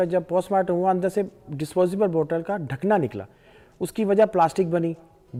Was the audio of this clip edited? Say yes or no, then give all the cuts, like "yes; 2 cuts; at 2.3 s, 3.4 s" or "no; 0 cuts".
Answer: no; 0 cuts